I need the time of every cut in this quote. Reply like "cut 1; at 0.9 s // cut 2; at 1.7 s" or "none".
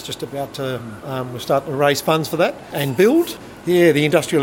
cut 1; at 1.0 s // cut 2; at 2.7 s // cut 3; at 3.4 s